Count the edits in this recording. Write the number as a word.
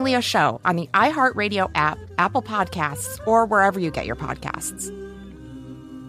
one